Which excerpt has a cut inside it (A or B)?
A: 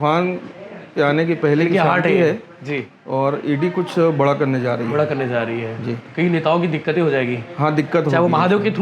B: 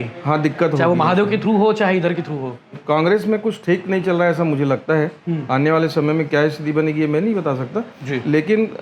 B